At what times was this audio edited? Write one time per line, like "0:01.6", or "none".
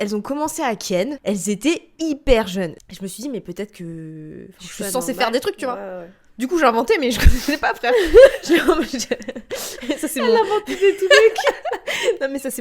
0:01.2
0:02.8